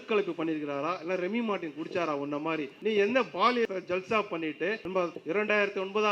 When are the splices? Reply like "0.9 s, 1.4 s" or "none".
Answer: 2.7 s, 3.7 s, 5.1 s